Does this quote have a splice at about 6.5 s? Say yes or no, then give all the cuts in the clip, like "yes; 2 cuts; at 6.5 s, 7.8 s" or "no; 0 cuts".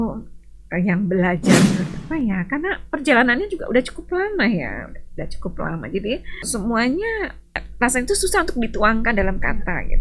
yes; 3 cuts; at 1.9 s, 6.5 s, 7.7 s